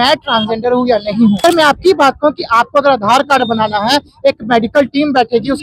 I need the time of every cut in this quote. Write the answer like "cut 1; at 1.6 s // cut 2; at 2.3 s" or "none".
cut 1; at 1.4 s